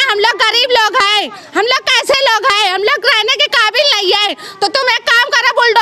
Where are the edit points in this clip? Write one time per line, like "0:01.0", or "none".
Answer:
none